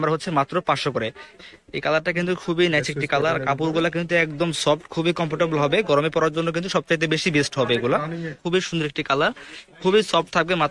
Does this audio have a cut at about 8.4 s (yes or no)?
yes